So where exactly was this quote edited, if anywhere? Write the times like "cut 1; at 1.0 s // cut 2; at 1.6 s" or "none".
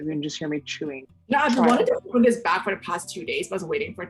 cut 1; at 0.9 s